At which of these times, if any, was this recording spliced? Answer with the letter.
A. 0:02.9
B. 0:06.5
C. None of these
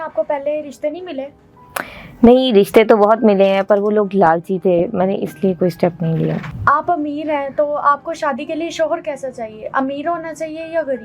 B